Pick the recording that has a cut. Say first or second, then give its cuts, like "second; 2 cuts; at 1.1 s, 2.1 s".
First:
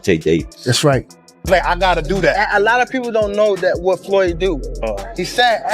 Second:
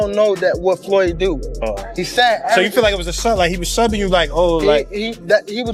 first; 1 cut; at 1.3 s